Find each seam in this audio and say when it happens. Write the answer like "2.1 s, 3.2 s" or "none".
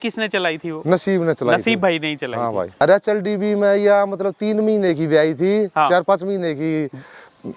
2.8 s